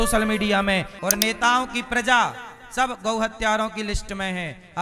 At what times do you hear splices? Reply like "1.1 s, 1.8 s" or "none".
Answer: 0.9 s